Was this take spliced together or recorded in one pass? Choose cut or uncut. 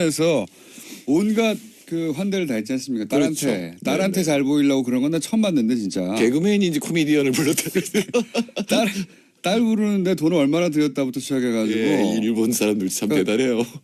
cut